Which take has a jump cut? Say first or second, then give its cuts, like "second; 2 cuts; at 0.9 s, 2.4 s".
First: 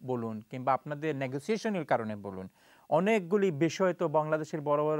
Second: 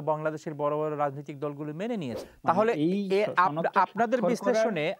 second; 1 cut; at 2.2 s